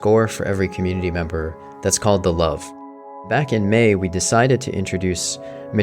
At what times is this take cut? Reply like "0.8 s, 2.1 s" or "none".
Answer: 3.3 s